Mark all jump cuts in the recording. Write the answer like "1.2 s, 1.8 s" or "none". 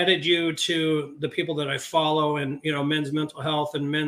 none